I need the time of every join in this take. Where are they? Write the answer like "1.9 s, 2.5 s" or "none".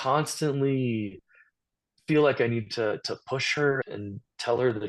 3.9 s